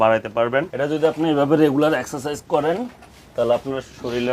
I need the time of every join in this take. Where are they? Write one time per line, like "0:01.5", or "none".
0:00.9